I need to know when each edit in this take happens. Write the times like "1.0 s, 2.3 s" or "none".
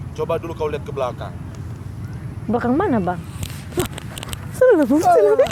none